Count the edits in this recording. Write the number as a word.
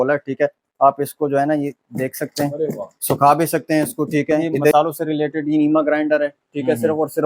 one